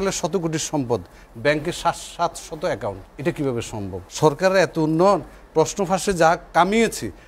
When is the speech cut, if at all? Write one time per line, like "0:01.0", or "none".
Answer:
0:03.1
0:04.0

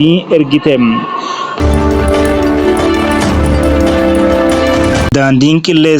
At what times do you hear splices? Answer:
0:01.5
0:05.1

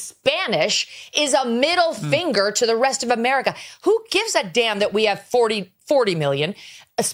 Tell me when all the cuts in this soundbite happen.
none

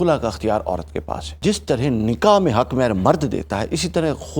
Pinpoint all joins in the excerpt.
0:01.2

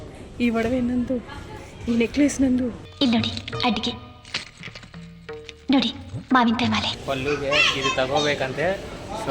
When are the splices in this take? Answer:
0:02.8
0:06.9

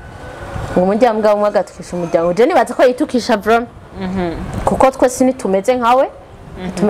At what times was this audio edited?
none

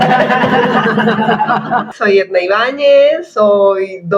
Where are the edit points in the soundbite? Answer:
0:01.9

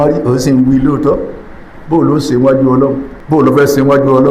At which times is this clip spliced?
0:03.1

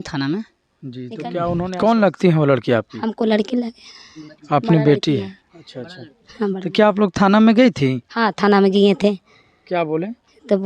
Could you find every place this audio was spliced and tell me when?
0:01.4

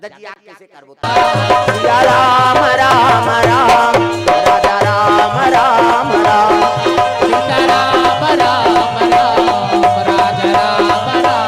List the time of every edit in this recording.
0:00.9

